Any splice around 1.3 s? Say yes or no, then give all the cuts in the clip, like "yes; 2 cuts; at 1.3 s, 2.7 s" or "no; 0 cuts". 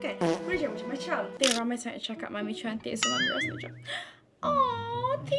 yes; 1 cut; at 1.3 s